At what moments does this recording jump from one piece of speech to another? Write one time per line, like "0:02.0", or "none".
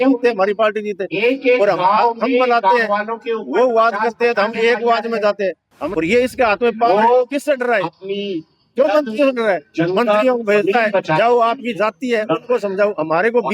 0:05.7